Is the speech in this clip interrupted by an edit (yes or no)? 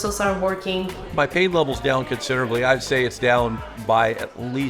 yes